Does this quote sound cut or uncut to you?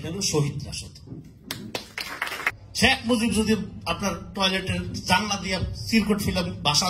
cut